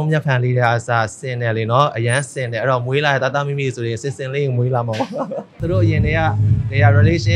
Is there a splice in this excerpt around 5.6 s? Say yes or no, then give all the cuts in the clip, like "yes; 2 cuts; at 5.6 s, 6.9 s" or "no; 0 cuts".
yes; 1 cut; at 5.6 s